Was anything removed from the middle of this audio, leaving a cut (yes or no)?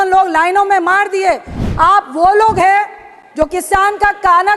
yes